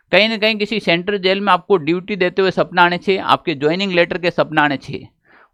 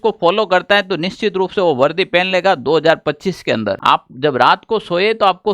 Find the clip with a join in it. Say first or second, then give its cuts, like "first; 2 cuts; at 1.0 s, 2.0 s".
second; 1 cut; at 3.8 s